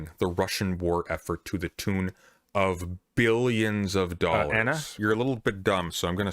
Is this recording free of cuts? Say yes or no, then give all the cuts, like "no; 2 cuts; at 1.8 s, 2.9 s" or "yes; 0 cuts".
no; 1 cut; at 4.5 s